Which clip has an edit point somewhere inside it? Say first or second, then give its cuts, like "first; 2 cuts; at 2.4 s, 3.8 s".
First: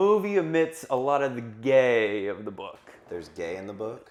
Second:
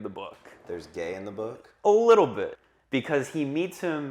second; 1 cut; at 2.6 s